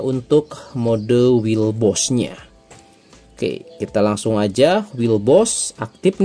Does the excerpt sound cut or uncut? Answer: uncut